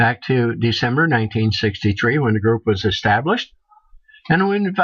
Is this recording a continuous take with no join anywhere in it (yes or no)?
yes